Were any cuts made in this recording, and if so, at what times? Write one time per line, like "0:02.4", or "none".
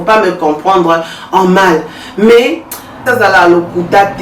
0:03.1